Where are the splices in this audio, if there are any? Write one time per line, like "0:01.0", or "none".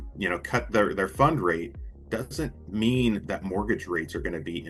none